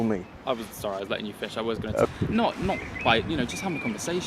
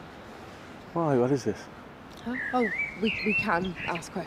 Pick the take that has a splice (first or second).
first